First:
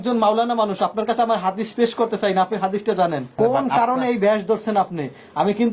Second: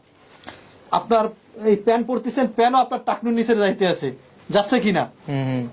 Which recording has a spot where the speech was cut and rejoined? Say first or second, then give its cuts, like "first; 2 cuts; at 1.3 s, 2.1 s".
first; 1 cut; at 3.3 s